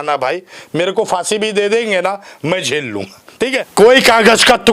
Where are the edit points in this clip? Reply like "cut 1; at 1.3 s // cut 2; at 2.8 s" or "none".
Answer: cut 1; at 3.6 s

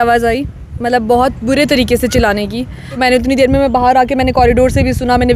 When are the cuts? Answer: cut 1; at 2.9 s

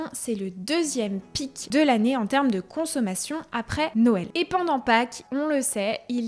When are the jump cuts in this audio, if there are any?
cut 1; at 1.6 s // cut 2; at 4.2 s

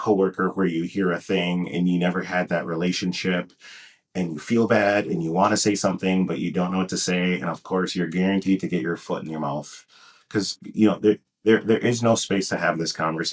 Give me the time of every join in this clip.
none

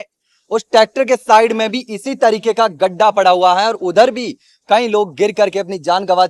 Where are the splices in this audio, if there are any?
none

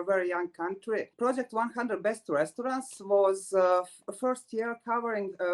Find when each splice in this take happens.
cut 1; at 1.1 s

